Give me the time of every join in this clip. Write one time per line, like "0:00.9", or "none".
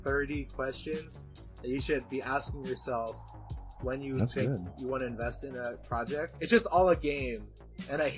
0:06.3